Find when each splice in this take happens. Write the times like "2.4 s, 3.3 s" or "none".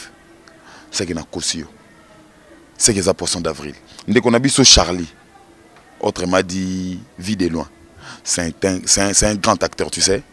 3.9 s